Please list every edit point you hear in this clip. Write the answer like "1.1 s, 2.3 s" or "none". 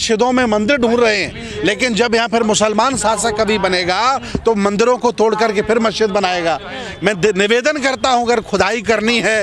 none